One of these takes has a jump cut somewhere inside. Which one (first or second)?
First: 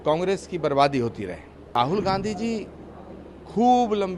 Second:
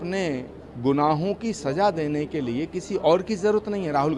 first